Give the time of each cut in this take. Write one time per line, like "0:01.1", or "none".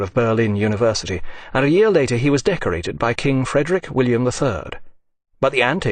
0:04.2